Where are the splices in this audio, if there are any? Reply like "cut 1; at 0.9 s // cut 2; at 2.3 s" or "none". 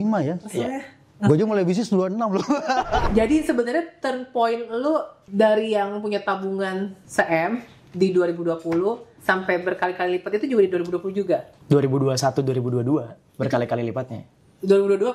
cut 1; at 3.1 s // cut 2; at 5.2 s // cut 3; at 7.0 s // cut 4; at 9.1 s // cut 5; at 11.5 s